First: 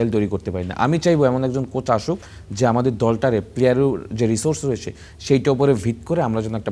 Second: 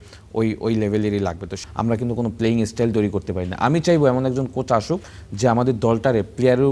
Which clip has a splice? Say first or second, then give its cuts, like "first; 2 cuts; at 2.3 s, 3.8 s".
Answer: second; 1 cut; at 1.5 s